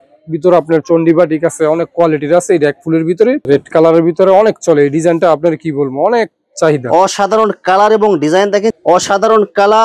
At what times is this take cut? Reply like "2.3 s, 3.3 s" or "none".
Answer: 3.4 s, 8.8 s